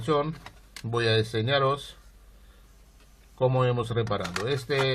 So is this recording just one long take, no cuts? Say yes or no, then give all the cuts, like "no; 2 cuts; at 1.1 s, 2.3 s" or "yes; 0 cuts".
no; 1 cut; at 1.0 s